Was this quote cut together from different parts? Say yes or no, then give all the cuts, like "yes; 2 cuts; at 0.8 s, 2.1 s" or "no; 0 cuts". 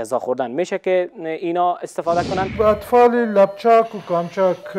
yes; 1 cut; at 2.5 s